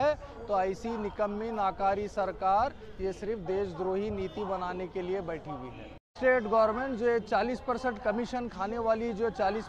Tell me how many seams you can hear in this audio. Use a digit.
1